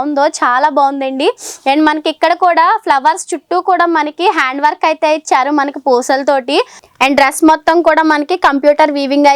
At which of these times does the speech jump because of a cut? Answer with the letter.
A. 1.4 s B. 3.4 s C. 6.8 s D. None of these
C